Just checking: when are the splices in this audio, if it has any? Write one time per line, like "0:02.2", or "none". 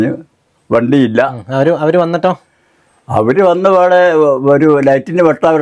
none